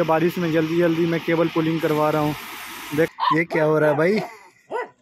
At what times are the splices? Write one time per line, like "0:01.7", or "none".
0:03.1